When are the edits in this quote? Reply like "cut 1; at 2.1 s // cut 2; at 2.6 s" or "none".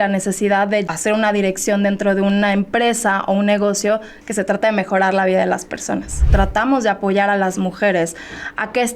cut 1; at 0.8 s // cut 2; at 4.1 s // cut 3; at 6.2 s